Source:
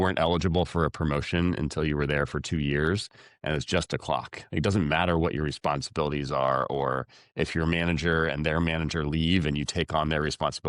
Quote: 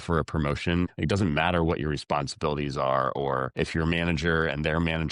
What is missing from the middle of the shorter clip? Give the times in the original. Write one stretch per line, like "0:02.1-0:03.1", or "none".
0:01.6-0:04.4
0:07.0-0:07.3

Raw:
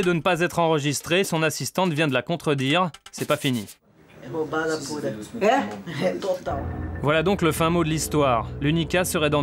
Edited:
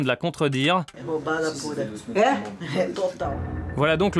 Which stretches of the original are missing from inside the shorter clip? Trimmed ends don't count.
0:03.0-0:04.2

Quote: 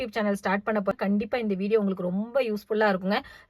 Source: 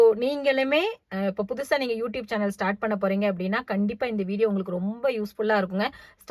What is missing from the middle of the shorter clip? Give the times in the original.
0:03.1-0:03.6

